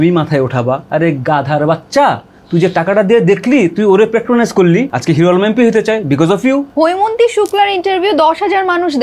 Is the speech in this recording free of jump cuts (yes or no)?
no